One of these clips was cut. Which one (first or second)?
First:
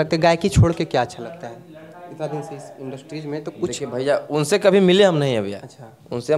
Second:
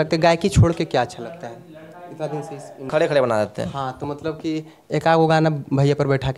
second